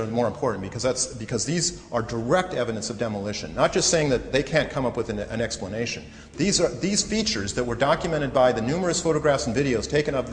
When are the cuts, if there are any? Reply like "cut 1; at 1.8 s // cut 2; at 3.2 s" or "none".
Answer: cut 1; at 2.9 s